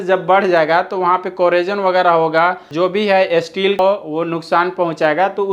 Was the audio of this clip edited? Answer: yes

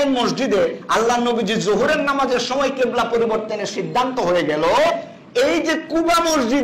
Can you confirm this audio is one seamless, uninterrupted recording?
yes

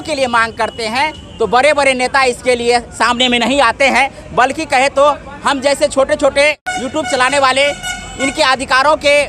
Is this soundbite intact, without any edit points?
no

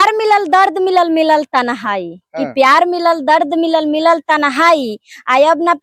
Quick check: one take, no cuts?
yes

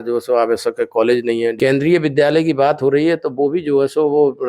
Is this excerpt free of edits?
no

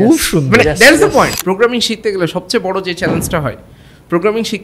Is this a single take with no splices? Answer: no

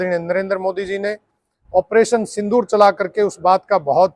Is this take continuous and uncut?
yes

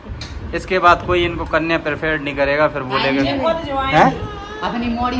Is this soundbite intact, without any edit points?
yes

